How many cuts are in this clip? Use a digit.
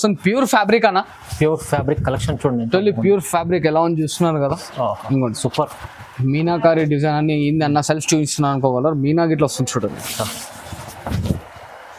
0